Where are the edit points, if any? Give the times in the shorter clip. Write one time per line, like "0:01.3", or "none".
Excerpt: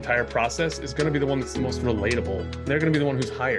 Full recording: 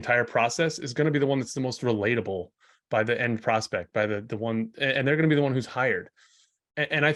0:02.7